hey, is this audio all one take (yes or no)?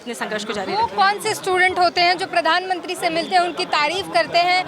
yes